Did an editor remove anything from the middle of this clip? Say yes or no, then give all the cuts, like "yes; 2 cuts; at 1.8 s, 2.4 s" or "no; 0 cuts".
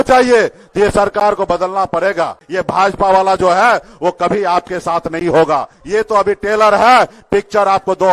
yes; 2 cuts; at 2.4 s, 5.7 s